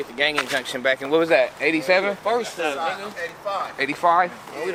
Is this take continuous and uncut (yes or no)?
yes